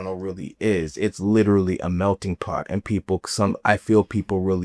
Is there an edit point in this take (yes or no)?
no